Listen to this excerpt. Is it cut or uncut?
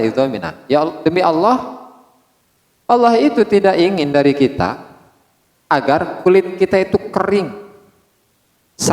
uncut